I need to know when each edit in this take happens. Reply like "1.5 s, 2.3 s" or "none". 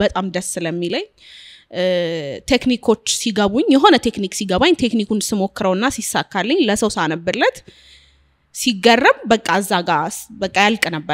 none